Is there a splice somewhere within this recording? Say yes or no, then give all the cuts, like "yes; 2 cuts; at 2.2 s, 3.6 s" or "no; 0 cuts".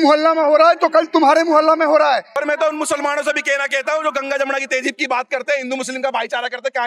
yes; 1 cut; at 2.3 s